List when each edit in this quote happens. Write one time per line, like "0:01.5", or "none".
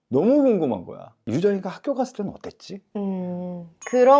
0:01.2